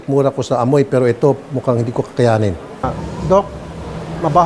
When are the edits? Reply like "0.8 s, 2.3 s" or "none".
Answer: 3.0 s